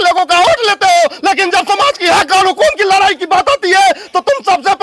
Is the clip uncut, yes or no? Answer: yes